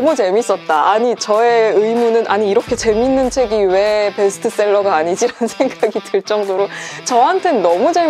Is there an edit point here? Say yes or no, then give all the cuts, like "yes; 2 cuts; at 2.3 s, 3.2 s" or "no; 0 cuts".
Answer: no; 0 cuts